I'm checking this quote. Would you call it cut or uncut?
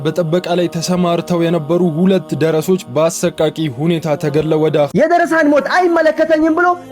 cut